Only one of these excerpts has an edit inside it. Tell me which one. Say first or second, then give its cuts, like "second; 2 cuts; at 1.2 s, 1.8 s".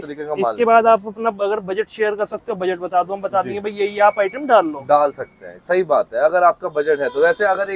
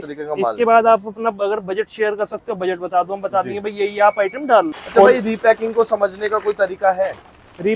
second; 1 cut; at 4.8 s